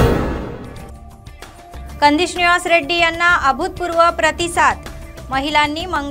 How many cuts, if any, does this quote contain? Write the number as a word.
one